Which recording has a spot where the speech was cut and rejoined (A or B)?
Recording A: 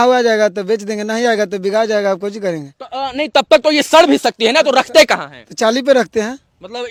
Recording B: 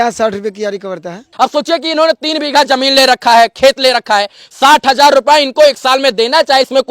B